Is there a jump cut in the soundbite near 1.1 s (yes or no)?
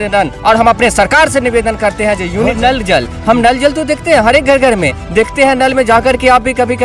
no